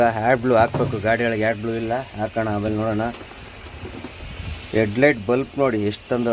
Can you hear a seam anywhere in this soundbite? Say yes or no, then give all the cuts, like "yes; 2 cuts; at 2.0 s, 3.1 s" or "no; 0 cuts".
no; 0 cuts